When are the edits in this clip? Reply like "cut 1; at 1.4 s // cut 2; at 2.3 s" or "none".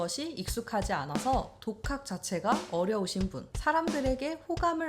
cut 1; at 3.5 s